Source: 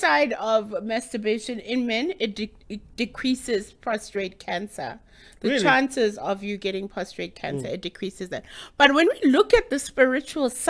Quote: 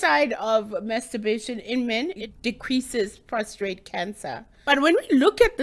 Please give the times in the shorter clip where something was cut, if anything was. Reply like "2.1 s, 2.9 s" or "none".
2.2 s, 4.5 s